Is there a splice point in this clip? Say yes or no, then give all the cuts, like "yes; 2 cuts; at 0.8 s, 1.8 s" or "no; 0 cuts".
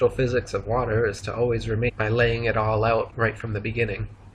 no; 0 cuts